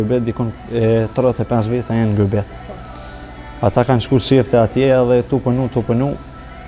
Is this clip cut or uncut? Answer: uncut